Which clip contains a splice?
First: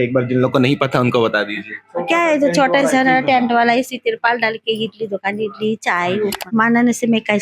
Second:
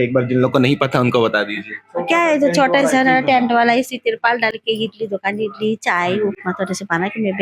first; 1 cut; at 6.4 s

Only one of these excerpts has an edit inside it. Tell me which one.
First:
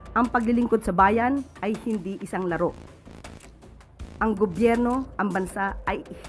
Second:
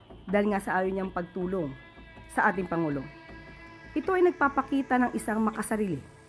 first; 2 cuts; at 2.7 s, 4.2 s

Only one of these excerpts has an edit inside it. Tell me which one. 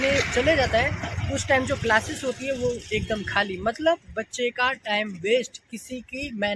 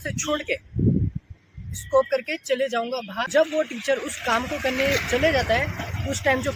second; 1 cut; at 3.3 s

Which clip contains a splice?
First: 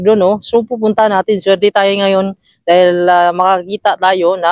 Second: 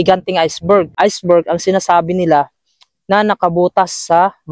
second; 1 cut; at 0.9 s

